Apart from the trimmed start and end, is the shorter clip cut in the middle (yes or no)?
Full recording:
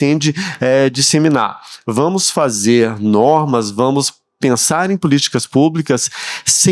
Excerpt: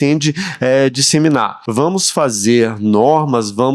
yes